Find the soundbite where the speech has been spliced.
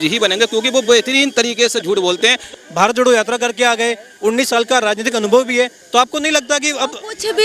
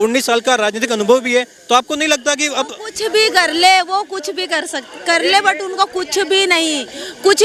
first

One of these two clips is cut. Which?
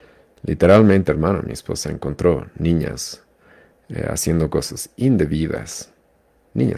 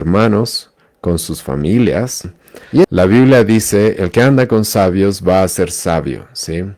second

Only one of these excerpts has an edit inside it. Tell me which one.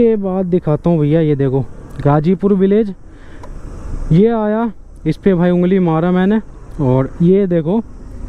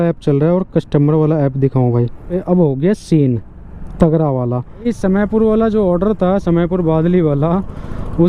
second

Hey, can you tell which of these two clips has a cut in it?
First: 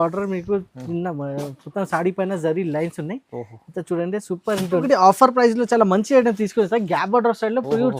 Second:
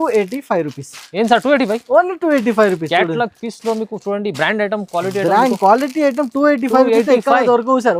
first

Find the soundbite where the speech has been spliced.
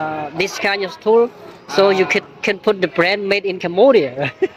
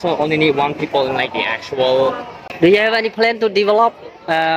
second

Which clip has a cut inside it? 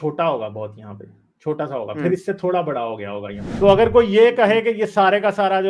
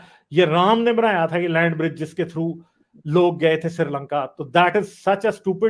first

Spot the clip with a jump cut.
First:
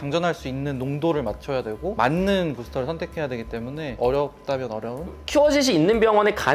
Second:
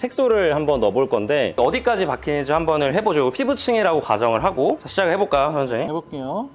first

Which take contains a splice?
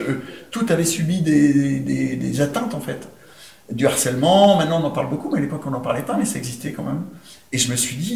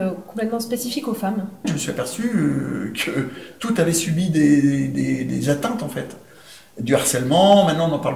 second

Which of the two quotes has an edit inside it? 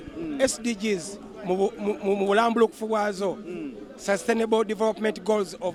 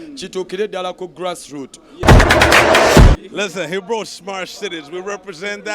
second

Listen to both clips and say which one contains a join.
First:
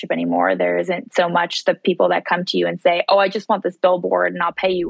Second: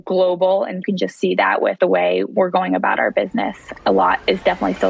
second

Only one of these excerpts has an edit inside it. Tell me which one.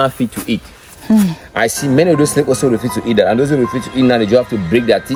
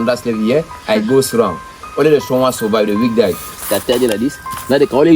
second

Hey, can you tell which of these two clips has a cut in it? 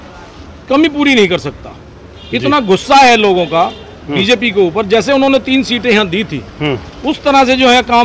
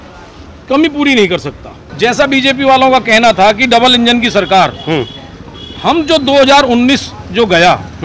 second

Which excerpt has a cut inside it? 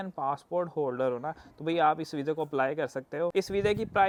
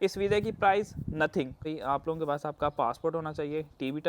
second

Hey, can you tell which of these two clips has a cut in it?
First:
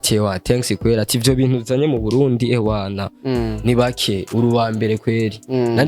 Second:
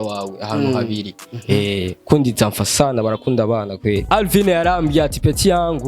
second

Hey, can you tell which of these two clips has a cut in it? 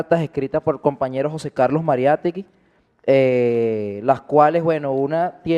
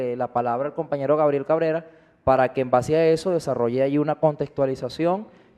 second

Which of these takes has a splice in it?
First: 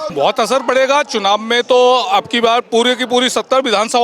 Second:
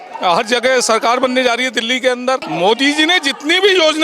second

